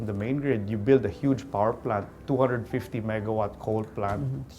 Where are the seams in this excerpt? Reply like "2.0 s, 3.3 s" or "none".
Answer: 2.1 s